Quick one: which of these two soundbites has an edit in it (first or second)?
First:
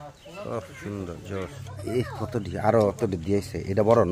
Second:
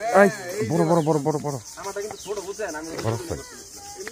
first